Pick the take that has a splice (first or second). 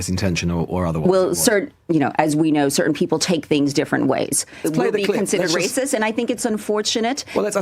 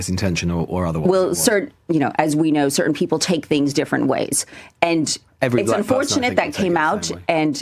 first